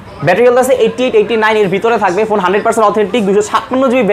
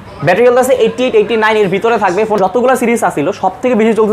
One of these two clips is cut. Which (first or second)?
second